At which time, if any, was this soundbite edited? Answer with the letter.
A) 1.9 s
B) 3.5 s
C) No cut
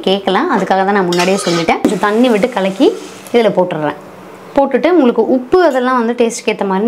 A